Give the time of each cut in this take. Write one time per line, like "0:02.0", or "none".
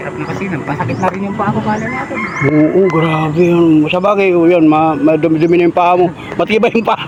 none